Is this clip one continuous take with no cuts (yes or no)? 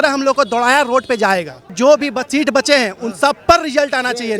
no